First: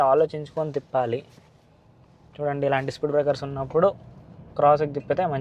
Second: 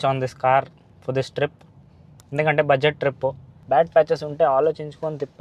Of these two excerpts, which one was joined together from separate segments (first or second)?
second